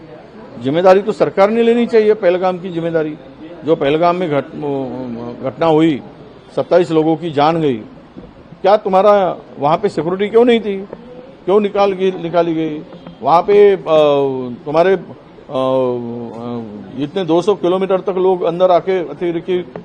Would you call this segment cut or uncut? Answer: uncut